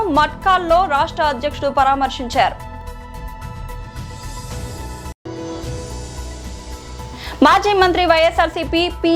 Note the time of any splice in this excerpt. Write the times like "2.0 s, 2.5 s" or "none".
2.8 s, 4.8 s, 7.1 s